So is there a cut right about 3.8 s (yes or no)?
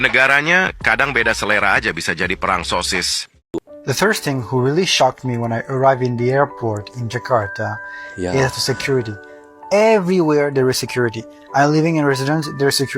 yes